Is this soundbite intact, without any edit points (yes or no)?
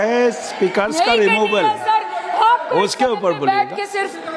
yes